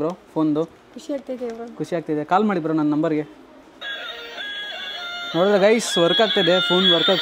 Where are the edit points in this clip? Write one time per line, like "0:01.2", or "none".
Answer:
none